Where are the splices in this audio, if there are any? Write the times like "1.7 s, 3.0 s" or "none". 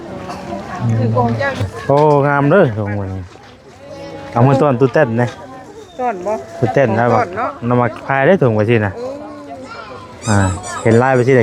1.6 s